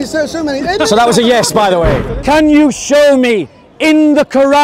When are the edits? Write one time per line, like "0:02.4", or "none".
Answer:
0:02.0

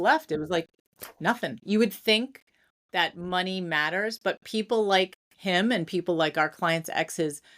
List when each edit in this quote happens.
0:01.6

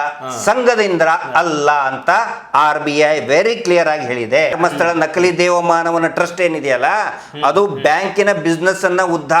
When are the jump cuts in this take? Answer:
0:04.6

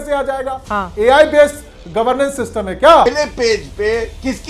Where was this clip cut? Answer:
0:03.1

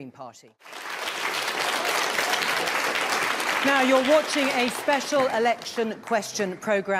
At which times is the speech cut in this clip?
none

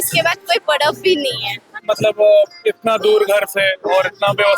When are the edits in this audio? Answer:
0:01.7

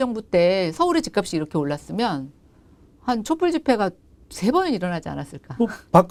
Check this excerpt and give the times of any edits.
none

